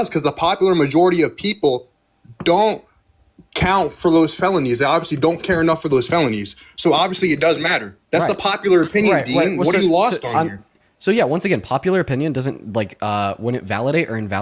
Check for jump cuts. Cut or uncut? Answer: uncut